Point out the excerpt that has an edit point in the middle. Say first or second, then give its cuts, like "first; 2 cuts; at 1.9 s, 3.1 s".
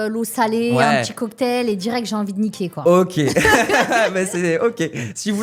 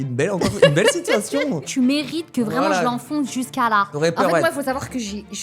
second; 2 cuts; at 1.6 s, 3.9 s